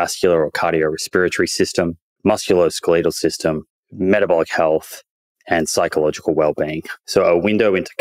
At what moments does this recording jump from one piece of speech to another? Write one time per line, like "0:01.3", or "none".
none